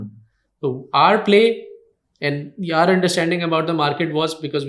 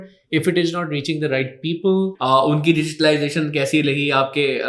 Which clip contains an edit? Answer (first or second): second